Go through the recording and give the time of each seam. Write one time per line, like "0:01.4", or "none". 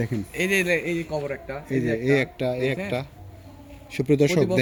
none